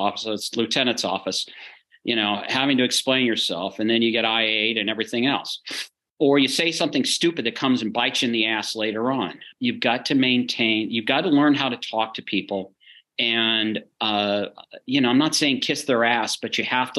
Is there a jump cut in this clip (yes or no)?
yes